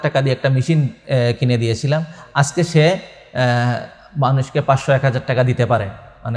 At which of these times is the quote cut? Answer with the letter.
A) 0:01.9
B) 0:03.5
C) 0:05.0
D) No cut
D